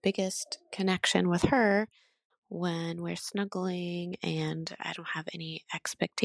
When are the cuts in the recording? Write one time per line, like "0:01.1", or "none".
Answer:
none